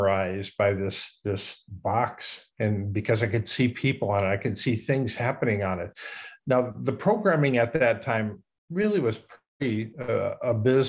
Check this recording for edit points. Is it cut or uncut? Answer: uncut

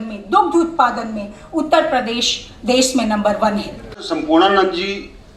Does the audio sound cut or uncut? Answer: cut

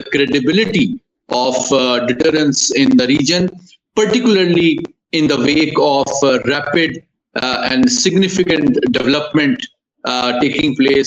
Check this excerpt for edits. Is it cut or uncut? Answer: uncut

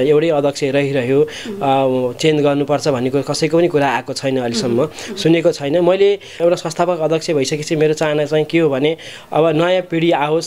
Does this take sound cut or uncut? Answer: cut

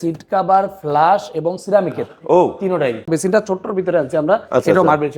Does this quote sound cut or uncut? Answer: cut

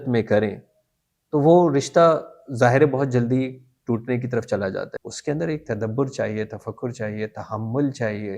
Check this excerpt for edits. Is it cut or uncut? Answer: cut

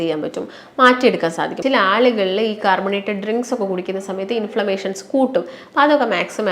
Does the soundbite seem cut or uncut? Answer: cut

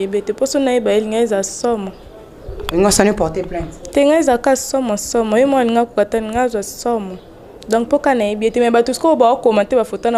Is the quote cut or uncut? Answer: uncut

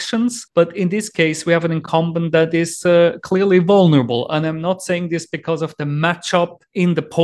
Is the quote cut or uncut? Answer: uncut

